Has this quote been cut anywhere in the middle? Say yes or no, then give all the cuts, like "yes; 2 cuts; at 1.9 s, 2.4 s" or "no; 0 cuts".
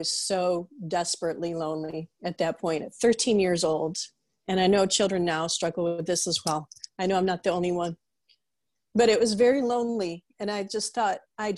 no; 0 cuts